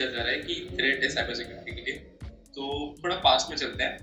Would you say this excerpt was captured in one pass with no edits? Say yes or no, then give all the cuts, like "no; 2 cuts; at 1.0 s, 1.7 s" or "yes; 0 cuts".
yes; 0 cuts